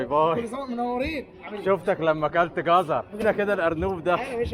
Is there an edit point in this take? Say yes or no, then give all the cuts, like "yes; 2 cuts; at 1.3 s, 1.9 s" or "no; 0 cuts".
yes; 1 cut; at 3.2 s